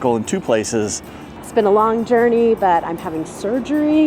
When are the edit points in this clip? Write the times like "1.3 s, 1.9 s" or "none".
1.2 s